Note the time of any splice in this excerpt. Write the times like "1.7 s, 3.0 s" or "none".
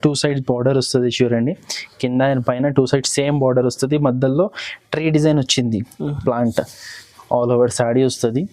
none